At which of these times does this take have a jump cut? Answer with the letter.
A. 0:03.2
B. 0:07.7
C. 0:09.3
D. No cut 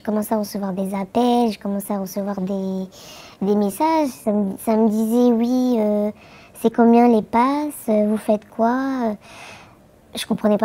D